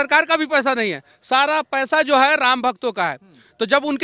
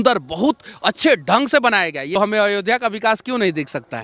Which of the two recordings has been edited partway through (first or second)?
second